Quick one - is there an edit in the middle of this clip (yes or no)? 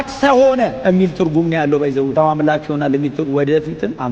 no